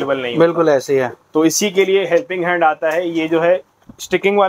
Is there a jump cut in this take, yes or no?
no